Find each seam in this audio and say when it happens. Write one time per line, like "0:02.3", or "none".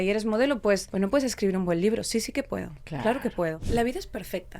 0:00.9
0:03.6